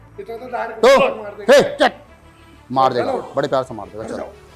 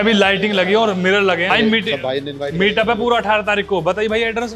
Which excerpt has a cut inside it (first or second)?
second